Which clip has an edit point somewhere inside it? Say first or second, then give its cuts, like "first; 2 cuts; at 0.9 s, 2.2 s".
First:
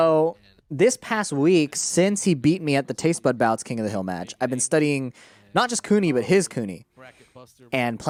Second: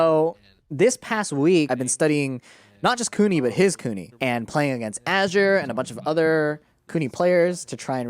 second; 2 cuts; at 1.7 s, 4.1 s